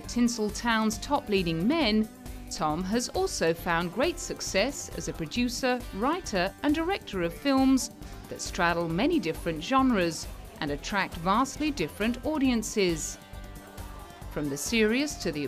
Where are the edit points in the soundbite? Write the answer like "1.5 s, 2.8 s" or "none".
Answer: 4.3 s